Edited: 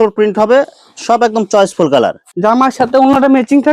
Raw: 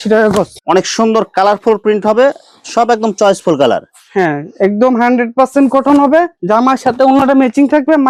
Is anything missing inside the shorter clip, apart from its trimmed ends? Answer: yes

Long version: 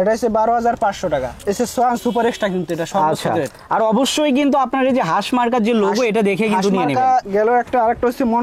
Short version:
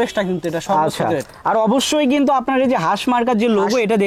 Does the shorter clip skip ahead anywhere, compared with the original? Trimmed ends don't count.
no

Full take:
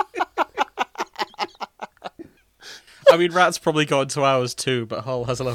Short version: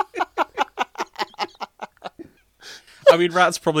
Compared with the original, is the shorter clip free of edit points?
yes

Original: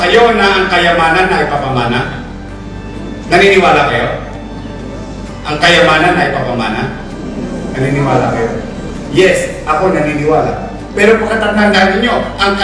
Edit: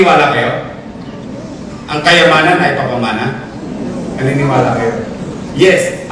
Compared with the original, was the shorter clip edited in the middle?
no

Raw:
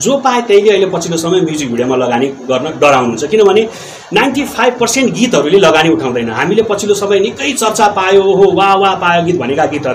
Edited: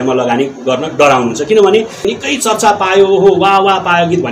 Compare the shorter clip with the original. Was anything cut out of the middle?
yes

